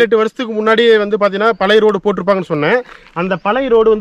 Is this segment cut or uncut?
uncut